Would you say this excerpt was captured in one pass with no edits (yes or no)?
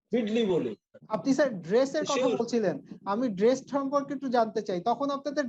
no